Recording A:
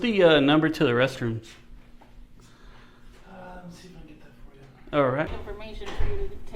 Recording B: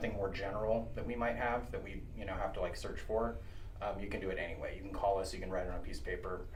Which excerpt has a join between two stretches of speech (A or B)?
A